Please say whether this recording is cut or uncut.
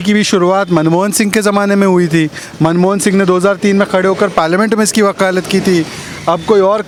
uncut